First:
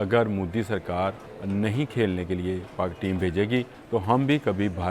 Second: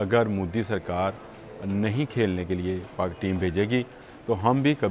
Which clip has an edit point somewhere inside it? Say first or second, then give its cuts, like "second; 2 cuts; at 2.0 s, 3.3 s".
first; 2 cuts; at 1.3 s, 3.8 s